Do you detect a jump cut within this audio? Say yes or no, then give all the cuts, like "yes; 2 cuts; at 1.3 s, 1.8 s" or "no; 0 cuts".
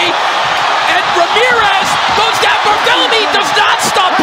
no; 0 cuts